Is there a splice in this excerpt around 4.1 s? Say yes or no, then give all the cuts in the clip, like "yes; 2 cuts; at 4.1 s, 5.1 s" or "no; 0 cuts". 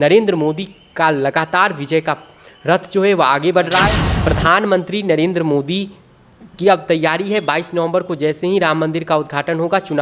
yes; 1 cut; at 4.1 s